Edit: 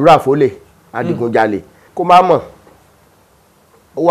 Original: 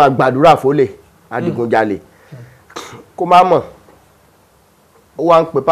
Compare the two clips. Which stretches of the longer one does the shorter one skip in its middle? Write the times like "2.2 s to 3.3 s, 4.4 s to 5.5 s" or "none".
2.2 s to 3.0 s